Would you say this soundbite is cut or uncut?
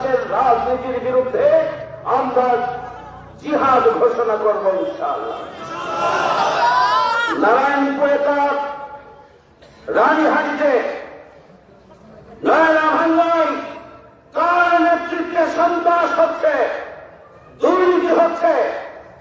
uncut